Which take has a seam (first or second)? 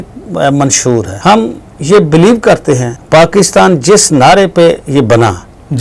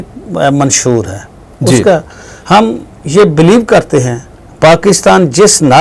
first